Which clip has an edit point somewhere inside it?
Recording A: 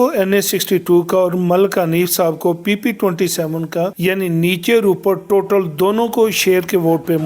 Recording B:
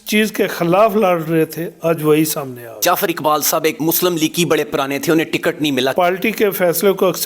B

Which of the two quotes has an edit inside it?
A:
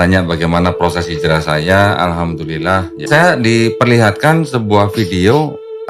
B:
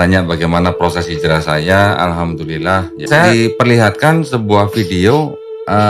B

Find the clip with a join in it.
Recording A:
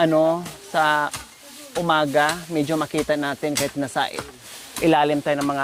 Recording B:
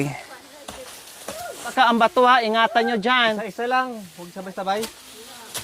B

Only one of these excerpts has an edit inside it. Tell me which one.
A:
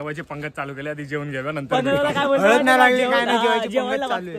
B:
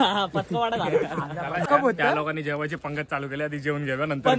B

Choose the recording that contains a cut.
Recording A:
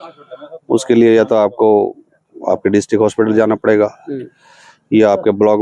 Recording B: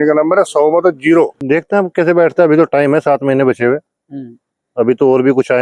B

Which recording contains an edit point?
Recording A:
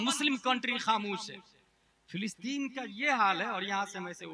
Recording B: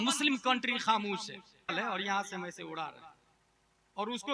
B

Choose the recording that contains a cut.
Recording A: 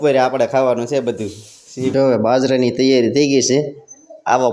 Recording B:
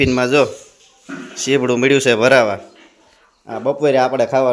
A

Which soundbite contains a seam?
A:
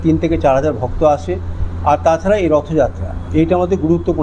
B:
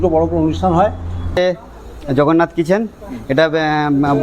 B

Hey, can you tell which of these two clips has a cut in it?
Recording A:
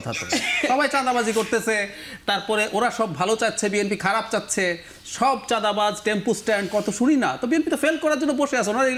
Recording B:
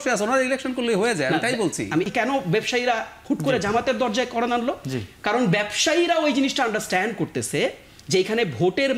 B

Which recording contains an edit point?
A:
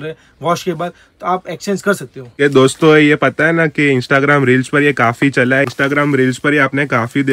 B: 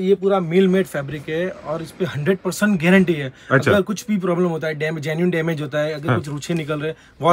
A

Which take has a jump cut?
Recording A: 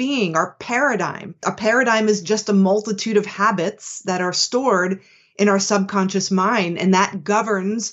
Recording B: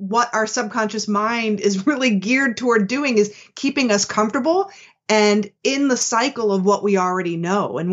A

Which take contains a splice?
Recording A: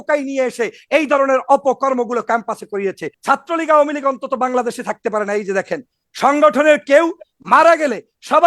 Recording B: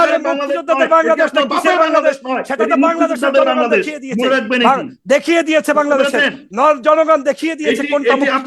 A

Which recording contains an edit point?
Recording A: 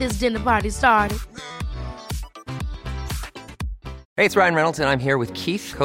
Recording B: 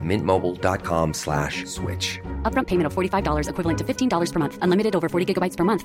A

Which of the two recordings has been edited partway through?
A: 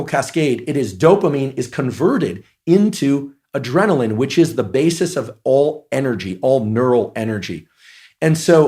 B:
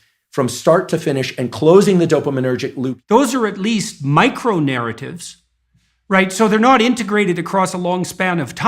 B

